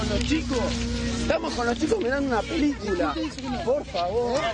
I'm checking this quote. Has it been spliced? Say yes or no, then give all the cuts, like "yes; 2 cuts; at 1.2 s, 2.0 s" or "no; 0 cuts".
no; 0 cuts